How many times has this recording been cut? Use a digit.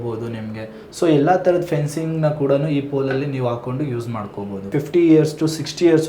1